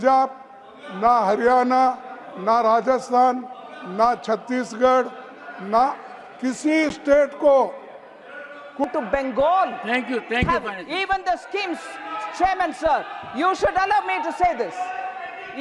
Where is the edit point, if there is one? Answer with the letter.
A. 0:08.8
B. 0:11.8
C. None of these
A